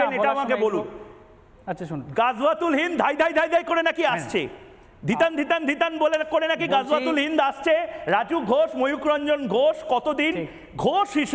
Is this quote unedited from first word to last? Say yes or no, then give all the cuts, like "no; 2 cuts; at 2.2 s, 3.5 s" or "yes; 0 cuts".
yes; 0 cuts